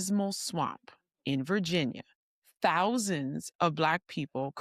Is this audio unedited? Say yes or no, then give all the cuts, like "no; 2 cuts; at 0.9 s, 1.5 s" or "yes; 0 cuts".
yes; 0 cuts